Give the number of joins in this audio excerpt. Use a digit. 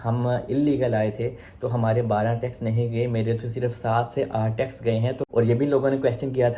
1